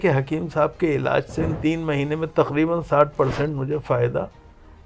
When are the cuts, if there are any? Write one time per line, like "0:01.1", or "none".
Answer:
0:01.5